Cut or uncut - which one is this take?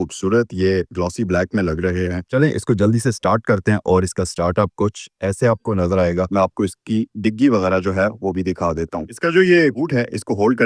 cut